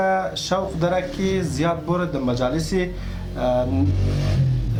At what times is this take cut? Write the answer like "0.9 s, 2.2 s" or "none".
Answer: none